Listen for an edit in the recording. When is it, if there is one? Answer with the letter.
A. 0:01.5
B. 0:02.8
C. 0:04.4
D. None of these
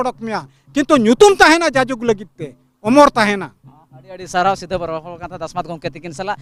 D